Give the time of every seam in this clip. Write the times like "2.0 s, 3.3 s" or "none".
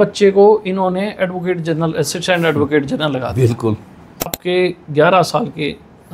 4.4 s